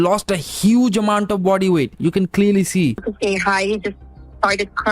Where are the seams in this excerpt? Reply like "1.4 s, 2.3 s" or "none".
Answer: 3.1 s